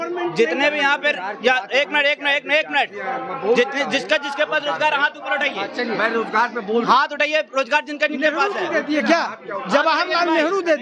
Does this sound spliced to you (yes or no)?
no